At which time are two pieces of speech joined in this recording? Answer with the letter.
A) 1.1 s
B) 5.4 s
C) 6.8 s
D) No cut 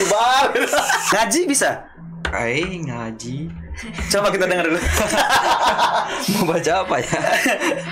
A